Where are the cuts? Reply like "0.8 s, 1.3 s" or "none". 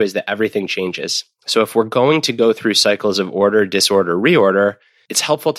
none